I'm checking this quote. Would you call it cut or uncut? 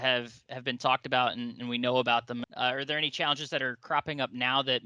cut